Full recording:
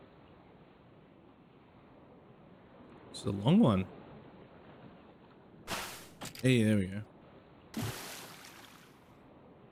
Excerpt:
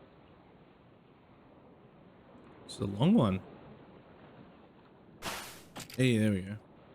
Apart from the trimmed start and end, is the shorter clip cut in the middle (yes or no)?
yes